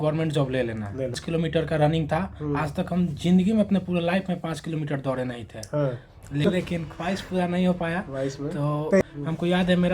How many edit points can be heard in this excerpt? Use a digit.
3